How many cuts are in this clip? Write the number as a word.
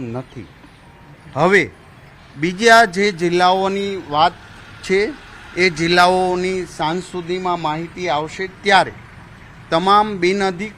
one